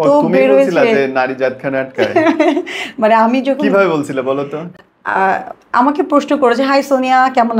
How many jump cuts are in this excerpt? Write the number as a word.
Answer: zero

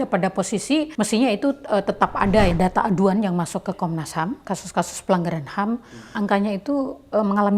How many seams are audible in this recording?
three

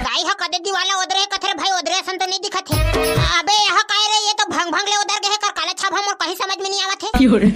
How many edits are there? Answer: one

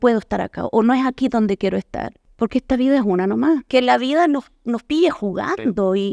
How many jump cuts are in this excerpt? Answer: two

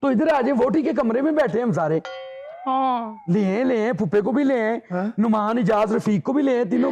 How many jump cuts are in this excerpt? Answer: zero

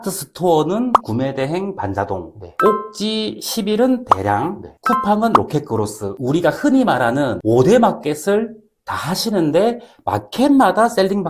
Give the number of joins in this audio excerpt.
zero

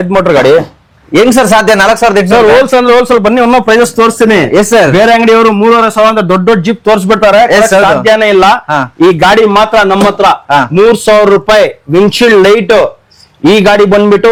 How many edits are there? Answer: zero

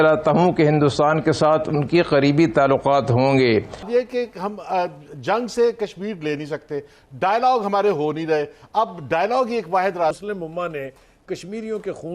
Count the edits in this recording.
two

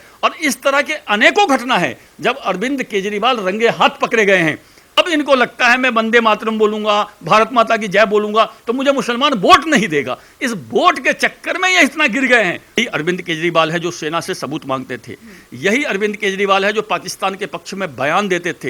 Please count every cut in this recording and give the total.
two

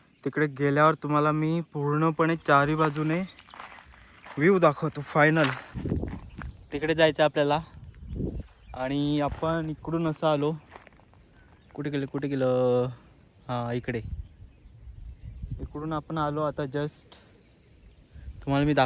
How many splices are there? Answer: one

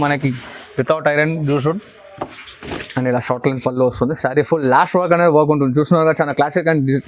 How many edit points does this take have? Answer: one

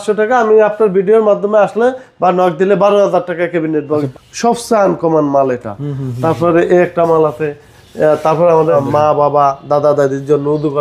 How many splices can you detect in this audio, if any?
two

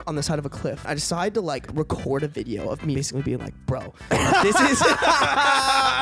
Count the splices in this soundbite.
three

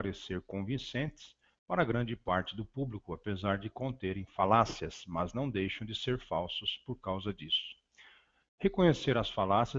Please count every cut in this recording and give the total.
one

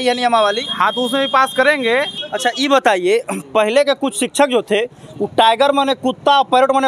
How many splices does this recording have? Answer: one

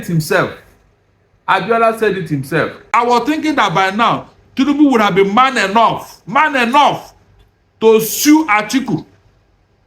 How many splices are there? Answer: one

